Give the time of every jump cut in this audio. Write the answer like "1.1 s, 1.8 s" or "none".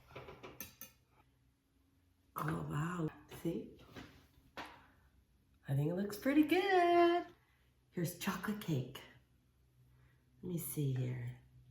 1.2 s, 3.1 s, 7.3 s